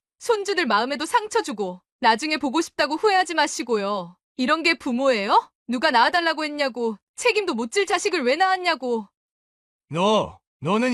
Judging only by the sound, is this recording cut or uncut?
cut